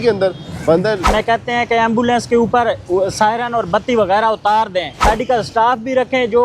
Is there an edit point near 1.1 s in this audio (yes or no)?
yes